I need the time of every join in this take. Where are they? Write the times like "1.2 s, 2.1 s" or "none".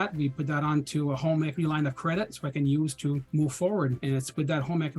3.2 s, 4.0 s

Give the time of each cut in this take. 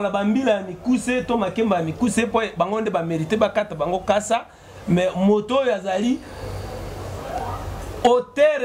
none

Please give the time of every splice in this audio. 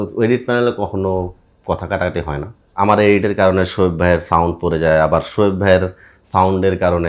2.6 s

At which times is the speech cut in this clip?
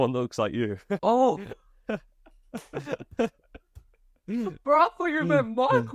1.0 s

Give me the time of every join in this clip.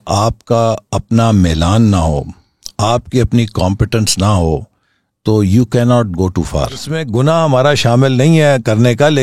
7.0 s

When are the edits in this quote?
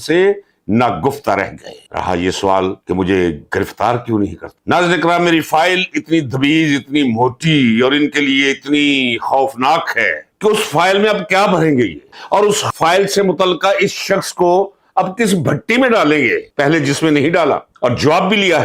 none

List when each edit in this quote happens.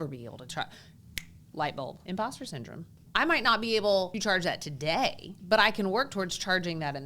2.0 s, 2.9 s, 4.1 s, 5.4 s

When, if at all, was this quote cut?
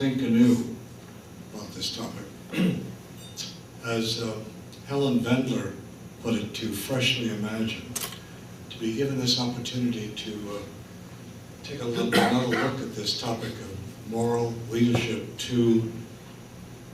12.2 s

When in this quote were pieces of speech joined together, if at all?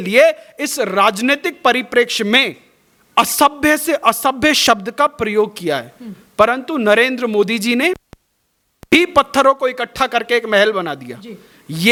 none

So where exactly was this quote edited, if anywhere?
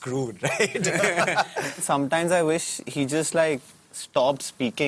1.8 s

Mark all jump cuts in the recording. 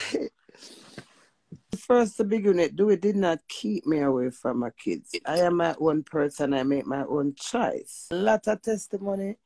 1.8 s, 8.1 s

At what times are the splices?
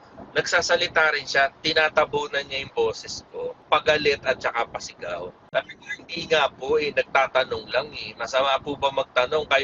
3.5 s, 5.5 s

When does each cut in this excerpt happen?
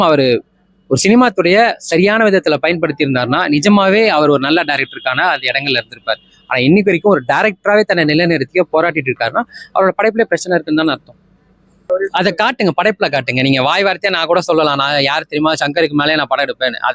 11.8 s

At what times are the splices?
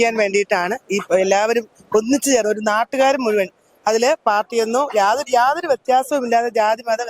none

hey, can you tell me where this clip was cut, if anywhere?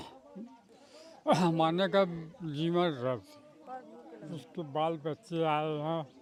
none

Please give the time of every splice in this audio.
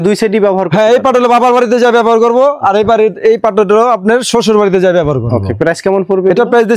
none

